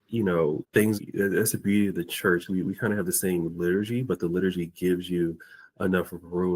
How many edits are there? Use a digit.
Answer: 1